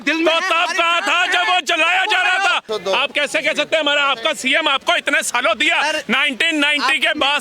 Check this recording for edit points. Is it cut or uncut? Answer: cut